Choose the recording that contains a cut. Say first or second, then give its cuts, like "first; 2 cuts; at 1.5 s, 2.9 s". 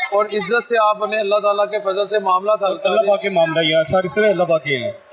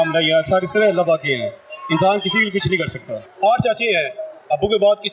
second; 1 cut; at 3.2 s